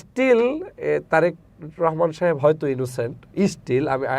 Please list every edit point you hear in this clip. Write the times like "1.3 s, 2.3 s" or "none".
none